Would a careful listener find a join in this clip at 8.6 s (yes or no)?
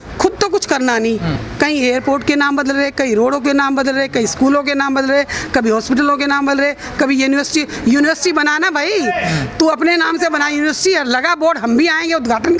no